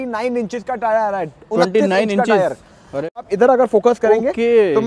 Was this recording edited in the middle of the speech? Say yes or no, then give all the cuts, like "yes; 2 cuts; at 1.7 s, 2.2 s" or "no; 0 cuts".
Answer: yes; 1 cut; at 3.3 s